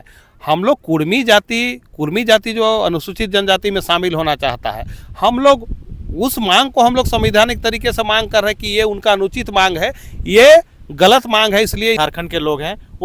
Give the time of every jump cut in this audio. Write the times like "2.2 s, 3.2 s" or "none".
12.0 s